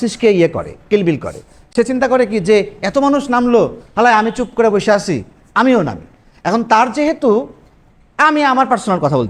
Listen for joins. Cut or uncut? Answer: uncut